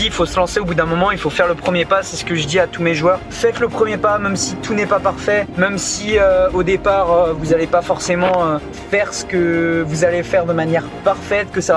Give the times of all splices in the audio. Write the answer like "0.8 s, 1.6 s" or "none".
3.3 s, 5.5 s, 8.7 s, 10.9 s

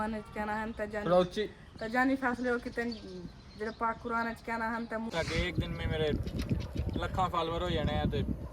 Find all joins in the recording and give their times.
5.1 s

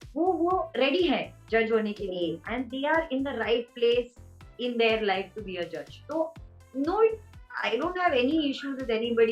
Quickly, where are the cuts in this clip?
none

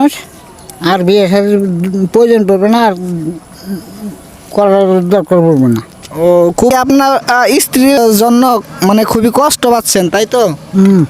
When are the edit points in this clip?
6.7 s, 8.0 s

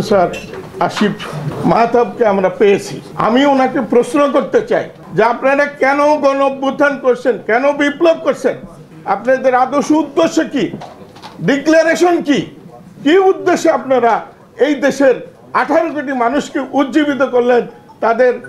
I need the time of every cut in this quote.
1.5 s, 3.0 s, 5.0 s

